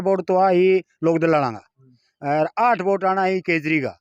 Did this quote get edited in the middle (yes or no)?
no